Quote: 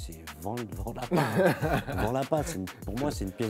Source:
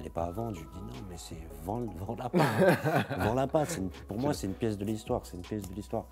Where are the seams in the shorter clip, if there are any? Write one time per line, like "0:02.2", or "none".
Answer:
none